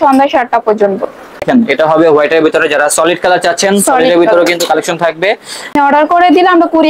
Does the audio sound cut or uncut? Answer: cut